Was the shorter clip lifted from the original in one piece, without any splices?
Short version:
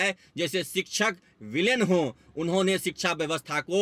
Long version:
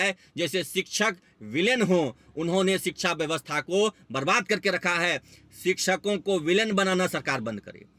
yes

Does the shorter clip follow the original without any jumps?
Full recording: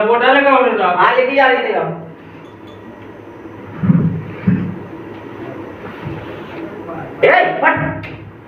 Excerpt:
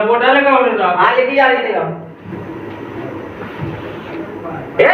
no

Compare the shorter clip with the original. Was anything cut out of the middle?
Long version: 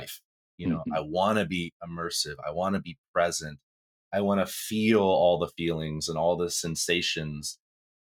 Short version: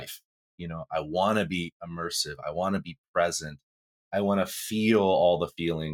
no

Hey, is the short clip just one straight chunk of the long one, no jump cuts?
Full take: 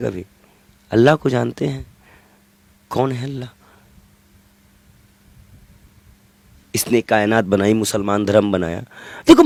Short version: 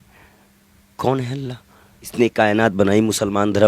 no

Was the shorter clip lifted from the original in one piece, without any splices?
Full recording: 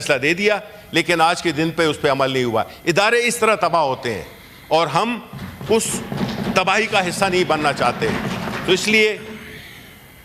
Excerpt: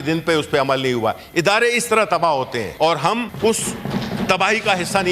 no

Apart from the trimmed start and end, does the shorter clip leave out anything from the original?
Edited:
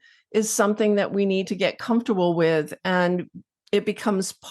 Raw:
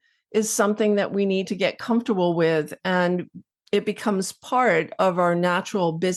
no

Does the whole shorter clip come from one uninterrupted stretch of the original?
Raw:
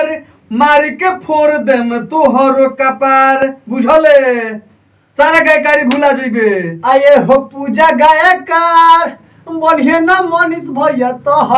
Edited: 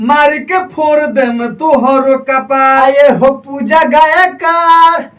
no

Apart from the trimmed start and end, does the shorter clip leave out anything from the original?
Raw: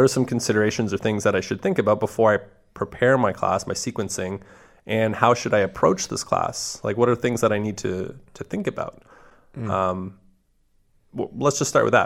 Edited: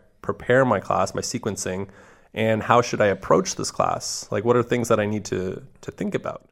no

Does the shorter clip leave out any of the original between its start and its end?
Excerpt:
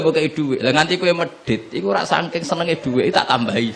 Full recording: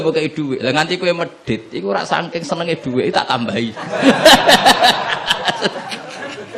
no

